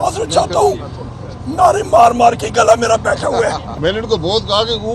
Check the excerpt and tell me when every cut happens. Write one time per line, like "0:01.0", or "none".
0:03.7